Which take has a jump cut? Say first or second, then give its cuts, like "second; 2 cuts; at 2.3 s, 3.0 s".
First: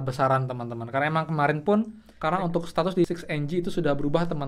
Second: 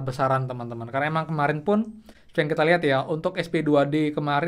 first; 1 cut; at 2.0 s